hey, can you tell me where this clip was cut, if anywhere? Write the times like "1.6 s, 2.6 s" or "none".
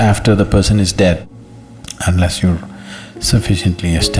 1.2 s